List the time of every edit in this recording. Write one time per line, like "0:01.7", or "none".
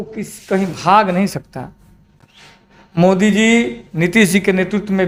none

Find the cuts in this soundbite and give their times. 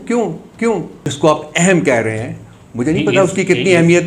0:01.1

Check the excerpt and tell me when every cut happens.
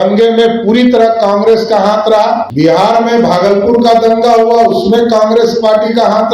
0:02.5

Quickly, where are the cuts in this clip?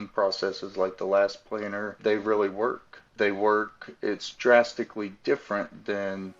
0:02.0
0:03.1

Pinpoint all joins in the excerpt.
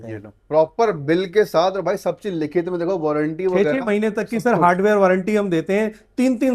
none

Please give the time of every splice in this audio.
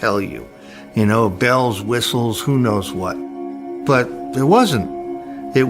0:03.7

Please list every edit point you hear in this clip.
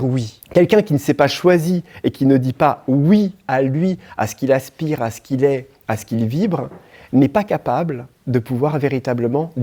none

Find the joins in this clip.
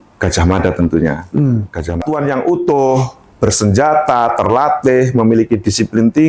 0:02.0

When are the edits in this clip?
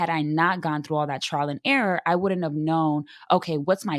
none

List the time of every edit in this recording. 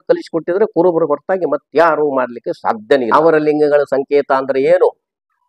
0:03.1

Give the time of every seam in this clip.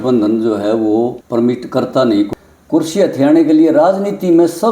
0:01.2
0:02.3

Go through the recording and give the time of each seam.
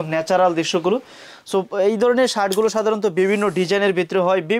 none

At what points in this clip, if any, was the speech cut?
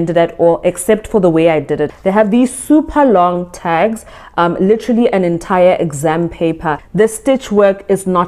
0:01.9
0:06.8

